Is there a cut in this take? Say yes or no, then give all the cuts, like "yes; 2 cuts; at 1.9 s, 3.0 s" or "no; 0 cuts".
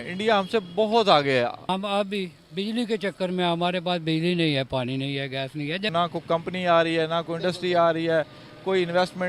yes; 2 cuts; at 1.6 s, 5.9 s